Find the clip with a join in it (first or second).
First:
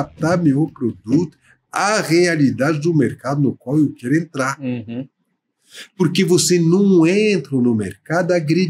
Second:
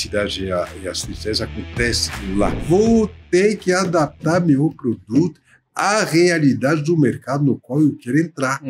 second